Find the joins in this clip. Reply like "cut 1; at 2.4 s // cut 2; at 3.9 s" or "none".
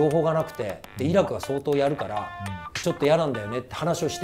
none